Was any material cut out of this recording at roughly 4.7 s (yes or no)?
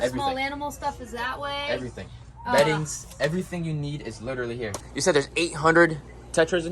yes